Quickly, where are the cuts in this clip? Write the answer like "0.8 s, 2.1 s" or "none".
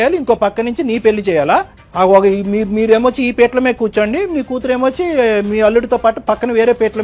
1.8 s